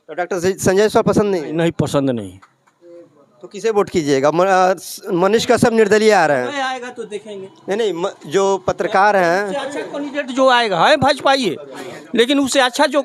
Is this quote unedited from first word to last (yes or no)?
yes